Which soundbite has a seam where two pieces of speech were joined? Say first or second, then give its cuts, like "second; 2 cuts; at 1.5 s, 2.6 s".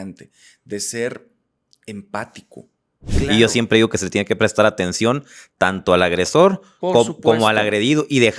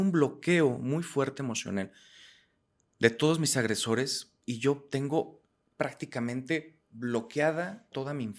first; 1 cut; at 3.1 s